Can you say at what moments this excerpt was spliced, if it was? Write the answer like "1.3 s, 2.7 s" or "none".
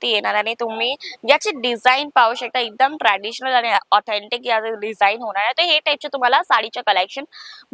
none